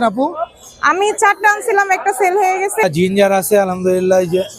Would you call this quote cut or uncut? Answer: cut